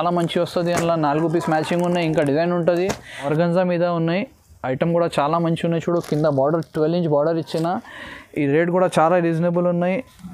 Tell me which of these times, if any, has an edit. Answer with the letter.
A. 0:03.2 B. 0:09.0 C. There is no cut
A